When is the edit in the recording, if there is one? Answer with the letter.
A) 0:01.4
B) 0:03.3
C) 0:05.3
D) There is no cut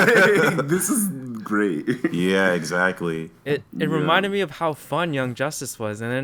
D